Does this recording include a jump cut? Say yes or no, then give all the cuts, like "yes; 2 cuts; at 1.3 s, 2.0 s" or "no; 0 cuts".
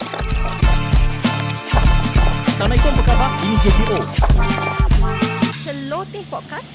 no; 0 cuts